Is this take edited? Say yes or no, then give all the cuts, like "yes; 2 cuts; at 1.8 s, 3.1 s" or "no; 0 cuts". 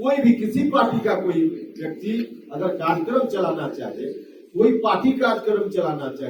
no; 0 cuts